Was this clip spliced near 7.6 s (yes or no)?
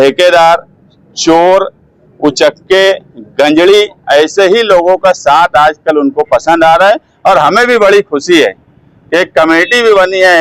no